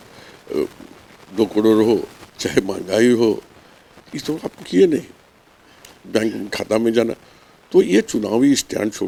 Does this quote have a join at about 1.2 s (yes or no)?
no